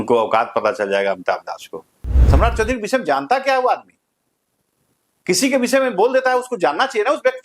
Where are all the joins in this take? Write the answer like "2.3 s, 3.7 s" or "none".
2.2 s